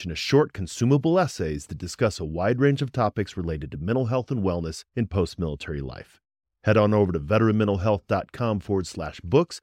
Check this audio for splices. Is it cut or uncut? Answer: uncut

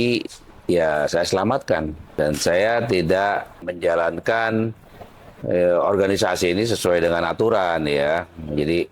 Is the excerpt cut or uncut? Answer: cut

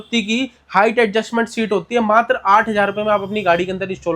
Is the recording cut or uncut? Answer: uncut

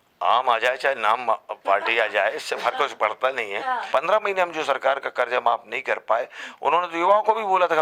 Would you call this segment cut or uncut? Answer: cut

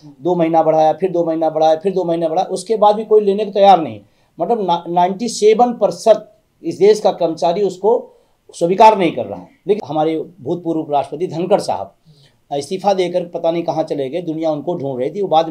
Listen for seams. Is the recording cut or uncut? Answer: cut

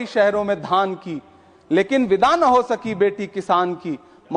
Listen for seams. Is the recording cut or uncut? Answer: uncut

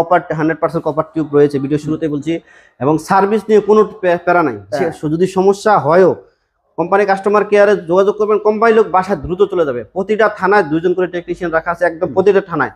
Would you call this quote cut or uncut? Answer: uncut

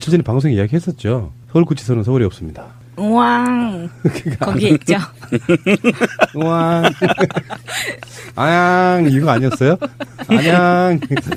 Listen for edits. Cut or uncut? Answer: uncut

